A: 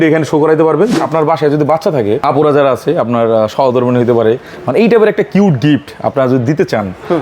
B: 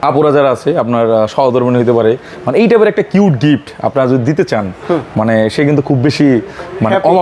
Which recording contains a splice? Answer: A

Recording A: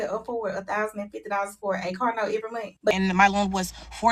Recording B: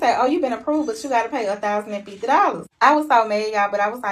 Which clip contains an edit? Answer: A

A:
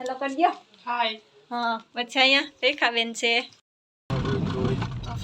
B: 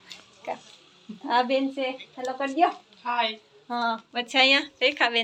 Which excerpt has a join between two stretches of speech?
A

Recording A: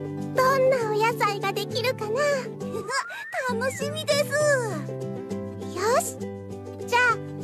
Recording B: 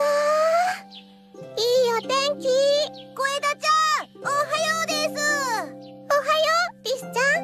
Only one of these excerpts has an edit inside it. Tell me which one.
A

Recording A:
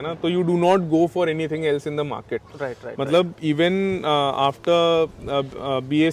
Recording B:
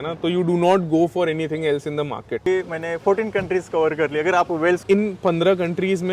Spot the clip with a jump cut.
B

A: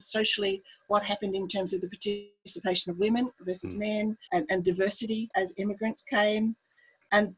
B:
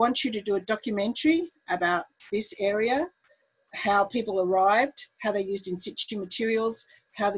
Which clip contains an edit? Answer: A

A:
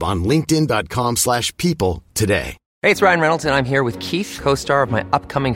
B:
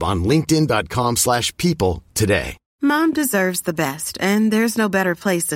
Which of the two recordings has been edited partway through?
B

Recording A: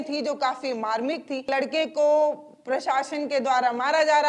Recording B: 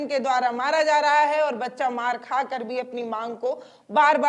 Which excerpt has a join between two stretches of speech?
A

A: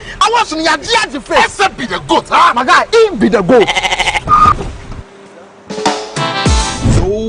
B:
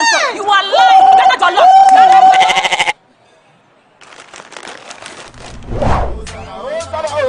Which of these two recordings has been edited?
B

